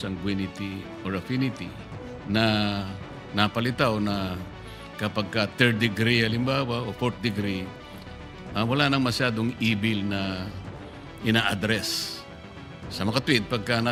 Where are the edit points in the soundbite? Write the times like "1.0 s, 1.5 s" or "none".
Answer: none